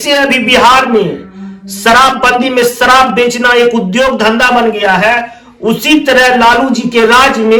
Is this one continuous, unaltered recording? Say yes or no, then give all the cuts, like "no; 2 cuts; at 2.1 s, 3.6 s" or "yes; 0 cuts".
yes; 0 cuts